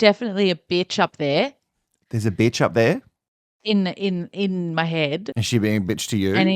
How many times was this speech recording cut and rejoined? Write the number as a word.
two